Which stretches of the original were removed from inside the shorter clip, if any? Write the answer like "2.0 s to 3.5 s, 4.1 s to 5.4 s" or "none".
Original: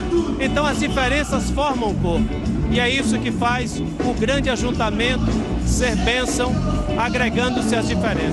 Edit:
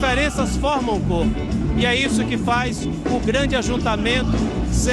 none